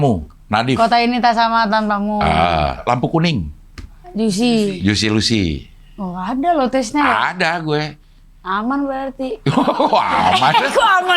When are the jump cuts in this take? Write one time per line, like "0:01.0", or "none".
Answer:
0:02.8